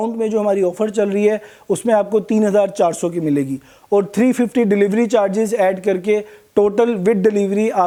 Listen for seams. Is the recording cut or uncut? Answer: uncut